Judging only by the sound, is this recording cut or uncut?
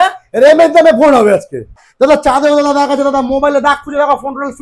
cut